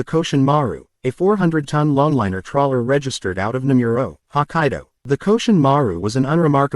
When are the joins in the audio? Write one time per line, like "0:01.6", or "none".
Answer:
0:04.9